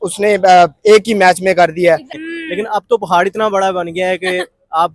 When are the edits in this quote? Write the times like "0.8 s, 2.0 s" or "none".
2.2 s